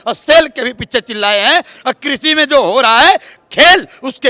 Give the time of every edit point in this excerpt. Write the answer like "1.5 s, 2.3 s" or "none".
none

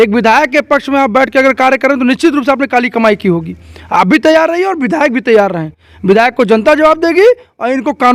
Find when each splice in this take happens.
none

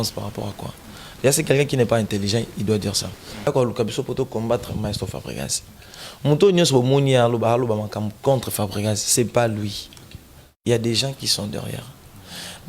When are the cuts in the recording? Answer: 3.5 s

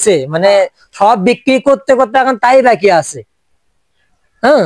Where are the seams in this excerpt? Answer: none

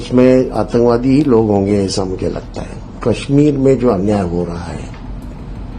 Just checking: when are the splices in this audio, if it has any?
2.9 s

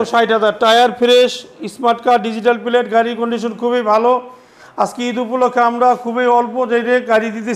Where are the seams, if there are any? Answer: none

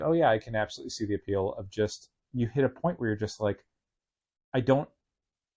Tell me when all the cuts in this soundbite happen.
none

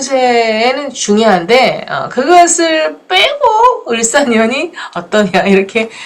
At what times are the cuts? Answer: none

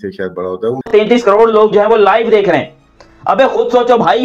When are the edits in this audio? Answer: 0.9 s, 3.2 s

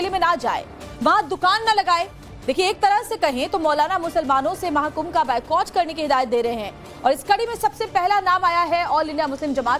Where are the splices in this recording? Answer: none

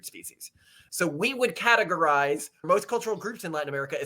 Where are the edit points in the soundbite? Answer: 2.6 s

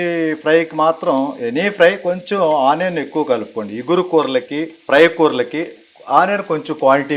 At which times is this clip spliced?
none

